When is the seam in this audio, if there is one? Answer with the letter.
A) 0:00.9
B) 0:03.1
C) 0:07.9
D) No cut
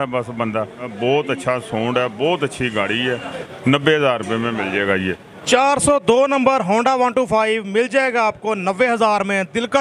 A